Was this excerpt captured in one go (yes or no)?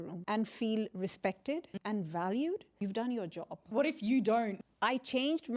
no